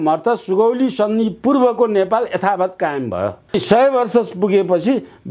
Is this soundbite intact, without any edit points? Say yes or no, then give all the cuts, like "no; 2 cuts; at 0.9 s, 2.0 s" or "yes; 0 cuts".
no; 1 cut; at 3.5 s